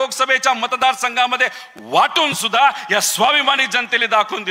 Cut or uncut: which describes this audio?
uncut